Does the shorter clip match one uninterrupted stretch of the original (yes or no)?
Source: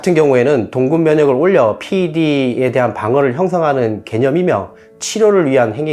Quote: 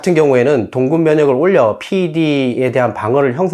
yes